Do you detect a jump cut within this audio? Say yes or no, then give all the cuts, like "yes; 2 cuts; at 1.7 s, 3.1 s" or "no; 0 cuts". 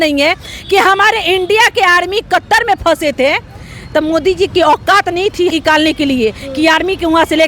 yes; 1 cut; at 5.5 s